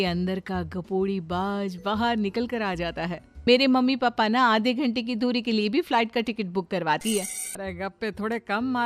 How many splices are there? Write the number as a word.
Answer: two